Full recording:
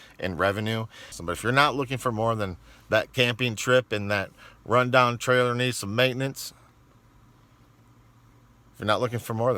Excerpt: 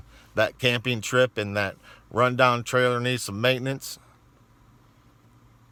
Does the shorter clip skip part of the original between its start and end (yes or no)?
no